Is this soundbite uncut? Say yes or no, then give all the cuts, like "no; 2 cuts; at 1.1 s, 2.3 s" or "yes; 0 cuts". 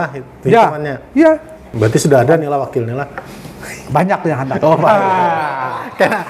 no; 1 cut; at 1.6 s